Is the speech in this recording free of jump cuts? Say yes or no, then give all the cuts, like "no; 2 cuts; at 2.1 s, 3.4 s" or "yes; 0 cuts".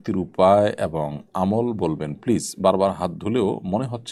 yes; 0 cuts